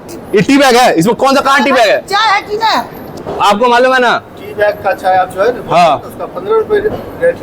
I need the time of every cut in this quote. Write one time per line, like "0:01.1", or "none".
0:03.0